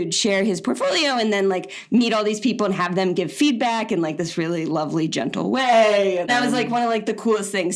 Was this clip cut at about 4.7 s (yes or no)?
no